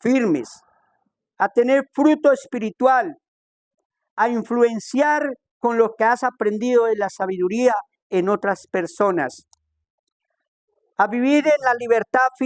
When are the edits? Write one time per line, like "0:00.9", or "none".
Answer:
none